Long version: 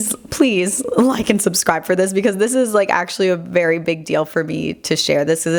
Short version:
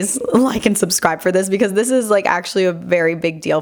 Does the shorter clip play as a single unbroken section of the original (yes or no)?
yes